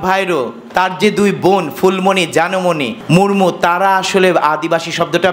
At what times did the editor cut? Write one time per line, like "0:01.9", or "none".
0:02.9